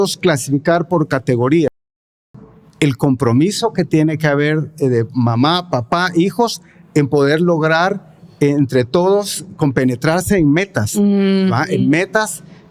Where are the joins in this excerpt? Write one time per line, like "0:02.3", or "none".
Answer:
0:02.1